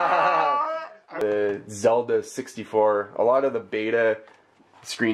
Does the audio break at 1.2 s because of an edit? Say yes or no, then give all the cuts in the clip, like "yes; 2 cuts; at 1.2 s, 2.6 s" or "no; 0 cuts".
yes; 1 cut; at 1.2 s